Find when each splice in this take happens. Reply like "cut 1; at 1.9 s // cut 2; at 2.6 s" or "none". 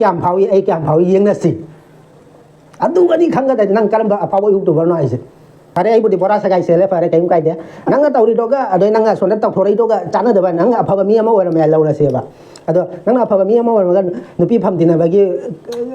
cut 1; at 5.8 s